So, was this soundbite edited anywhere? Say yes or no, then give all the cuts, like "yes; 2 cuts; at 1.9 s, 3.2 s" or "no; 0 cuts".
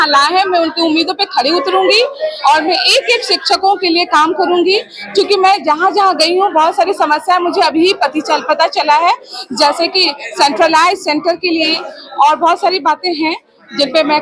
no; 0 cuts